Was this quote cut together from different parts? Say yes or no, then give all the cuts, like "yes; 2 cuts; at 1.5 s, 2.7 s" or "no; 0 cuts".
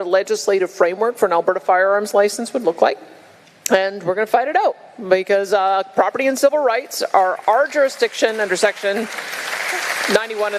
no; 0 cuts